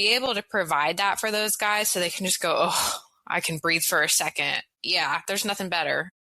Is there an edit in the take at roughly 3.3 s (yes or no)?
no